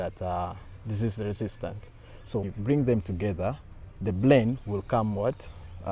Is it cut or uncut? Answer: cut